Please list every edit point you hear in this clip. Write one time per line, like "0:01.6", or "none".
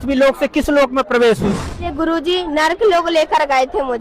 0:01.9